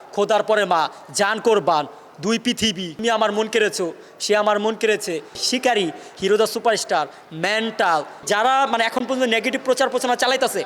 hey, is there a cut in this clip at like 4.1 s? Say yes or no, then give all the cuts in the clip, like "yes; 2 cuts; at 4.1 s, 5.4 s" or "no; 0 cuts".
no; 3 cuts; at 2.9 s, 5.4 s, 8.2 s